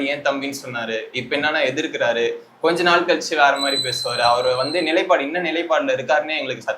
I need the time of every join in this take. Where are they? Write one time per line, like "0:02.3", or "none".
none